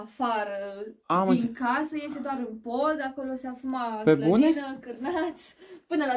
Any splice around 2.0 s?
no; 0 cuts

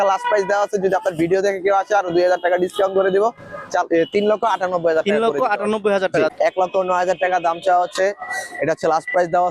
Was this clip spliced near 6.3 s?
yes; 1 cut; at 6.3 s

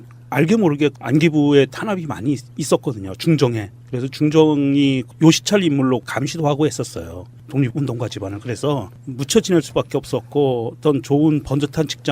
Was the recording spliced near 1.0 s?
no; 1 cut; at 7.7 s

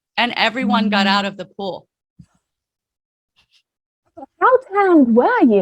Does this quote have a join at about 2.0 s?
no; 0 cuts

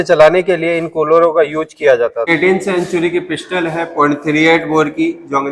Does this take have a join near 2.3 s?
yes; 1 cut; at 2.3 s

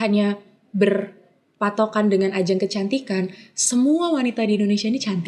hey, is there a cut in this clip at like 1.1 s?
no; 0 cuts

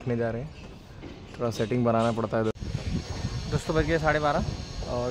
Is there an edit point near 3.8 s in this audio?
no; 1 cut; at 2.6 s

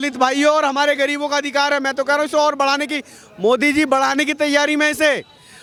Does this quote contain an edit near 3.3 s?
no; 0 cuts

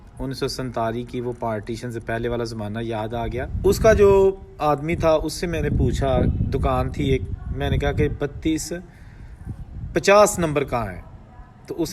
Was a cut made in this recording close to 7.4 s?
no; 1 cut; at 3.5 s

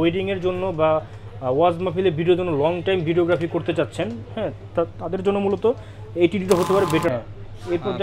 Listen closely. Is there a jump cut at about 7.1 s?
yes; 1 cut; at 7.1 s

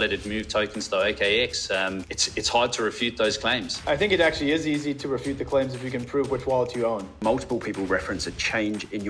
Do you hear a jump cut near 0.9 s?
no; 3 cuts; at 2.1 s, 3.8 s, 7.1 s

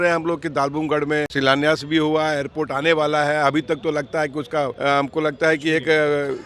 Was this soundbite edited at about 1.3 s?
yes; 2 cuts; at 1.3 s, 4.7 s

